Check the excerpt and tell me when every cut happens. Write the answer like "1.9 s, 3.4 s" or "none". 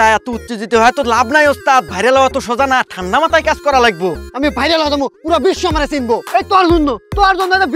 6.2 s

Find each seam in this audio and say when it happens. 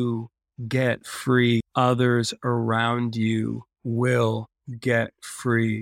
1.7 s

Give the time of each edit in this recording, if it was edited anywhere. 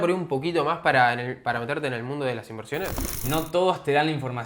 3.1 s

